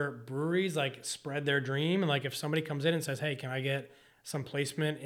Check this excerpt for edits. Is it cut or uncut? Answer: uncut